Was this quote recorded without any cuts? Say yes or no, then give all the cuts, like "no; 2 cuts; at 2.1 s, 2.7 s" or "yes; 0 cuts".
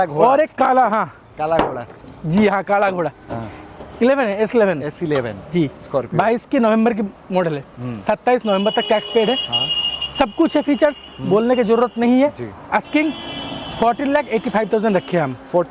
yes; 0 cuts